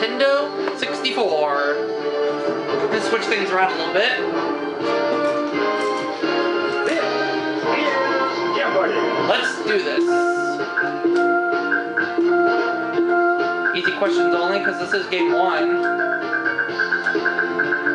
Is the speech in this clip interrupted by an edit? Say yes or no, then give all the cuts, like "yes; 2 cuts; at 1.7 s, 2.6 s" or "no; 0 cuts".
yes; 1 cut; at 9.9 s